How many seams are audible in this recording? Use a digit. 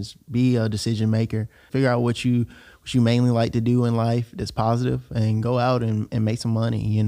1